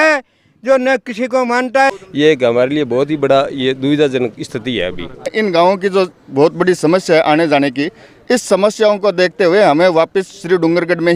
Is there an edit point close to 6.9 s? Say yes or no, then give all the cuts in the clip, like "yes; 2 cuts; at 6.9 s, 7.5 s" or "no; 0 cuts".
no; 2 cuts; at 2.0 s, 5.3 s